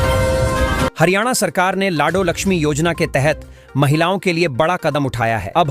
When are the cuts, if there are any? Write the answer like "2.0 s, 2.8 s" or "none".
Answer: 0.9 s